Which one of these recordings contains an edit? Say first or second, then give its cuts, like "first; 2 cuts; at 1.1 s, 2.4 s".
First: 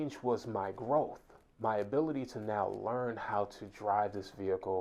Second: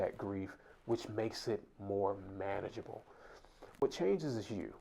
second; 1 cut; at 3.8 s